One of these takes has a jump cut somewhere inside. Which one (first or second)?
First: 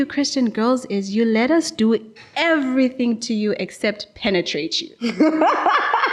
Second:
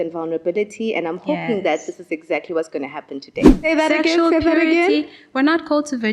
second